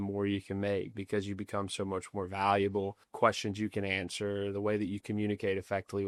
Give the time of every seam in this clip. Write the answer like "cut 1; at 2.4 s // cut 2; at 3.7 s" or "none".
none